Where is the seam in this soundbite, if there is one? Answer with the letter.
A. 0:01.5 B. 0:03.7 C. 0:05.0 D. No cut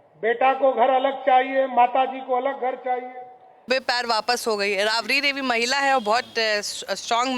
B